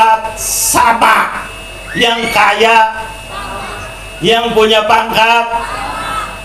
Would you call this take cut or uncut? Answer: uncut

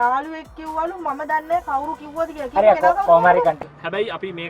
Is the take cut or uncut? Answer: cut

